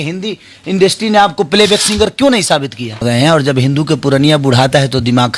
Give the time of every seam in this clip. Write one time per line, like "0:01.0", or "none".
0:03.0

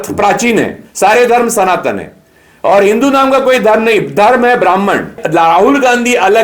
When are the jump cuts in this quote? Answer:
0:05.2

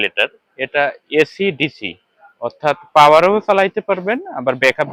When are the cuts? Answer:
none

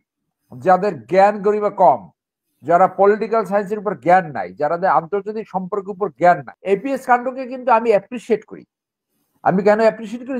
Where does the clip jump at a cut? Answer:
0:06.5

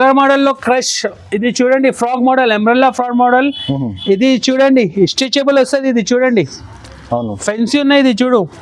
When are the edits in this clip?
none

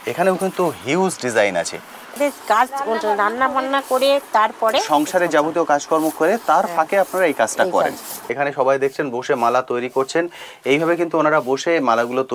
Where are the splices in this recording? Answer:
0:02.1
0:08.3

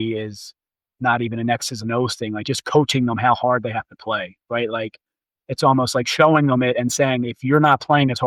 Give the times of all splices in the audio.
none

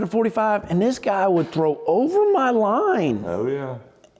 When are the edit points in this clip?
none

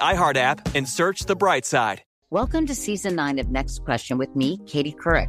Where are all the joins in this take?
0:02.0

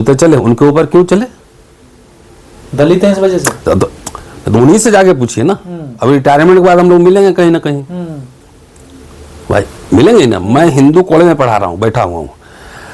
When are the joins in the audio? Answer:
none

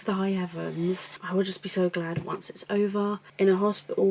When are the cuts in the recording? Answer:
0:01.1
0:03.2

